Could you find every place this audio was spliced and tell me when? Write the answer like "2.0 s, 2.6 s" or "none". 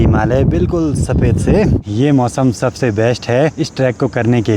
1.9 s, 3.6 s